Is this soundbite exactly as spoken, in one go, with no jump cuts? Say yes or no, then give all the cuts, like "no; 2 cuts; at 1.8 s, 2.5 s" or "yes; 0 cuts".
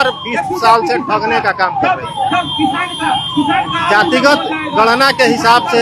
yes; 0 cuts